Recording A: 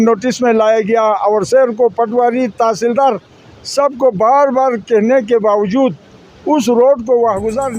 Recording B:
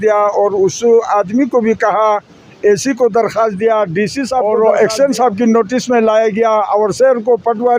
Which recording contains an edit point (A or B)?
B